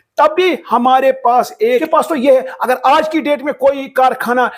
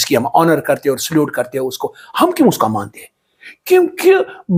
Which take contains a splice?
first; 1 cut; at 1.9 s

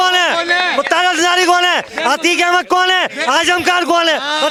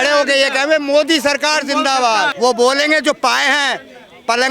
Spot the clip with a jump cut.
second; 1 cut; at 2.3 s

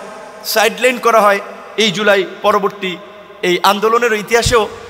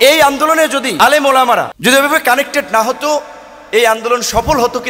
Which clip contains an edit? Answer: second; 2 cuts; at 0.9 s, 1.7 s

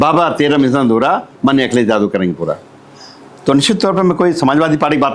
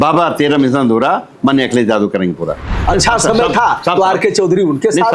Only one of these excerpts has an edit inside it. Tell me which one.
second; 1 cut; at 2.8 s

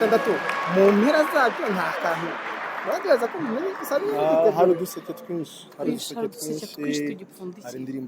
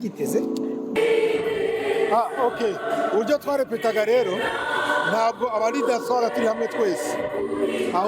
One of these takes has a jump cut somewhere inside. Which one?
second; 1 cut; at 1.0 s

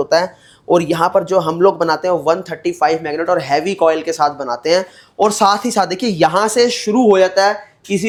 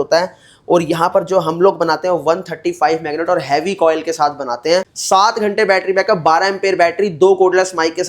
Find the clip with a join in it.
second; 1 cut; at 4.9 s

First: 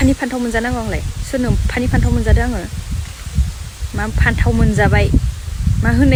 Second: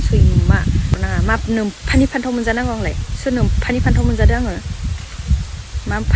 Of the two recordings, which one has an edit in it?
second; 1 cut; at 1.0 s

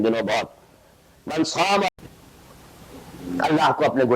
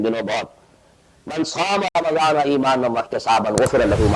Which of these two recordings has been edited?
first; 1 cut; at 1.9 s

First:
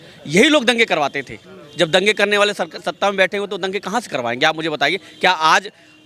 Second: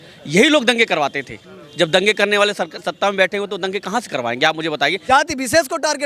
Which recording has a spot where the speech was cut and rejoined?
second; 1 cut; at 5.0 s

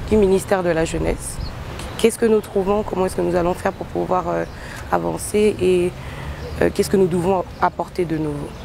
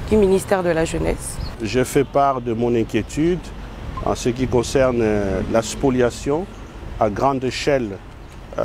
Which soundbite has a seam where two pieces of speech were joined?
second; 1 cut; at 1.5 s

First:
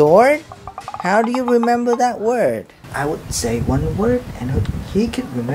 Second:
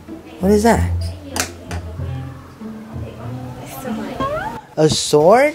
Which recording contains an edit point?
first; 1 cut; at 2.8 s

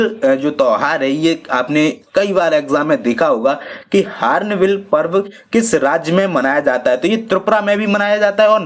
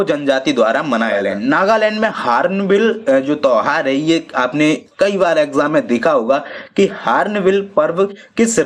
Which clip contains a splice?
second; 1 cut; at 1.2 s

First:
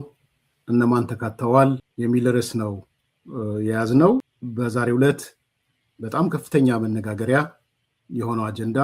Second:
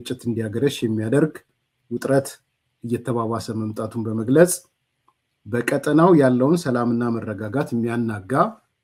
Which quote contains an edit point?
first; 2 cuts; at 1.9 s, 4.4 s

